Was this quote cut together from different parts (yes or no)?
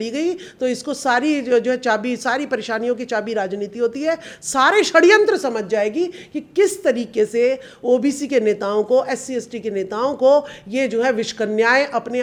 no